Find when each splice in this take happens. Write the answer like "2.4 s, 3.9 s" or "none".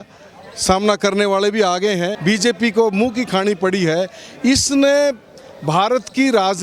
2.1 s

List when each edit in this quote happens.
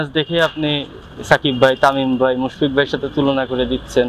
none

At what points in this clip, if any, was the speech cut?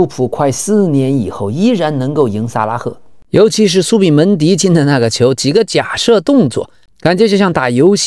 3.1 s

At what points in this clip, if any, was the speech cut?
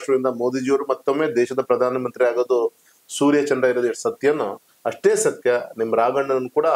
none

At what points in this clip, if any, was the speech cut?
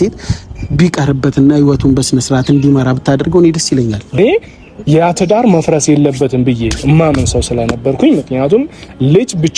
4.2 s

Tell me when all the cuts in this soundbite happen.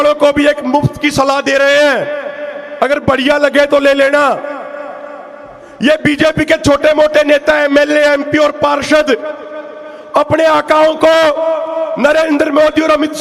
none

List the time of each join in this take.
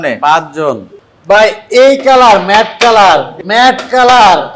0.9 s, 3.4 s

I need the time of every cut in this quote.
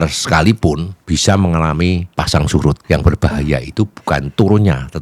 0.9 s, 2.1 s, 2.8 s

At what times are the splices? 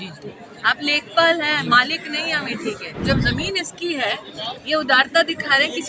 2.9 s

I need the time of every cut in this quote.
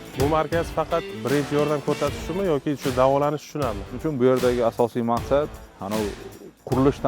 1.2 s, 4.0 s

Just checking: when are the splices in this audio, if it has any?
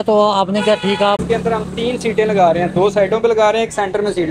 1.2 s

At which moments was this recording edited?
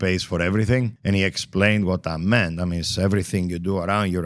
0.9 s

